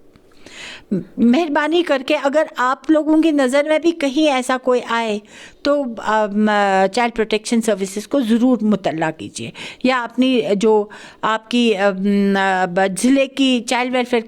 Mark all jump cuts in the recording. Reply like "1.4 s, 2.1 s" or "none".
none